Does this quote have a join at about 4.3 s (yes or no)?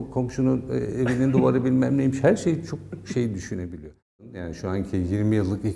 yes